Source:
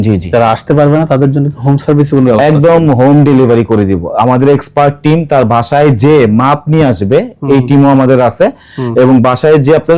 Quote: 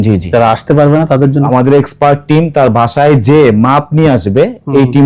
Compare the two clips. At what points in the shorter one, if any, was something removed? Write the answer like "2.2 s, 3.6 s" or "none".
1.5 s

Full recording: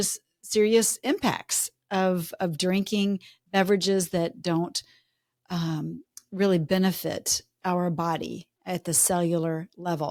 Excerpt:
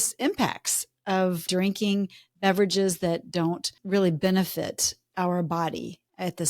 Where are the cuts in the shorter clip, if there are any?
1.4 s, 3.7 s

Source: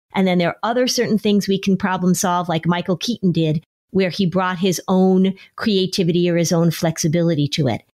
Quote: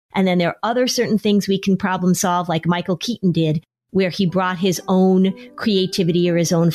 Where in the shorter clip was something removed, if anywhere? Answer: none

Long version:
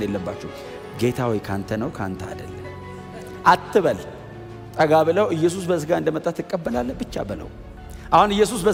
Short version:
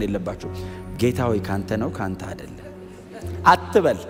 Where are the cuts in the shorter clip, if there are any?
none

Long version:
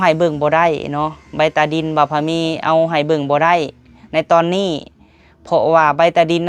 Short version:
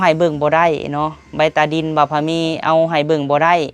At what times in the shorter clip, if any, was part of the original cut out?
none

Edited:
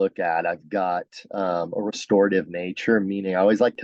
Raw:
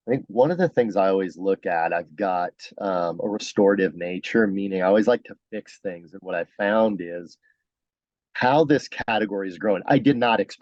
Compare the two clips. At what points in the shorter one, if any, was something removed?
none

